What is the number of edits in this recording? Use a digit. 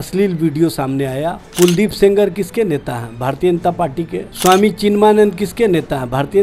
2